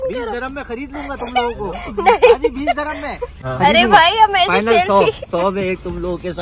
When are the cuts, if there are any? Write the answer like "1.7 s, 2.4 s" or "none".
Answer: 3.4 s